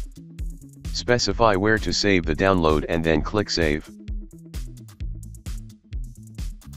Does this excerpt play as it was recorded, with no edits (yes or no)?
no